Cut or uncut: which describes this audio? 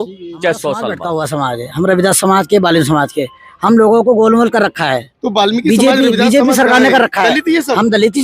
cut